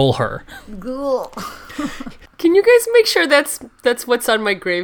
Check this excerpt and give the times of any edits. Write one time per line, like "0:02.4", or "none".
0:02.2